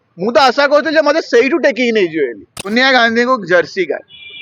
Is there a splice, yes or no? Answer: yes